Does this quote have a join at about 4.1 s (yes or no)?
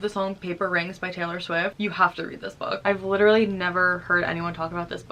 no